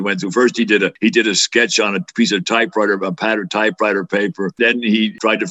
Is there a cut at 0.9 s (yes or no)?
yes